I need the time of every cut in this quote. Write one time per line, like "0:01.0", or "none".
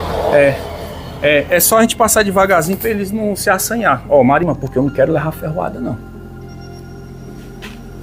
0:04.4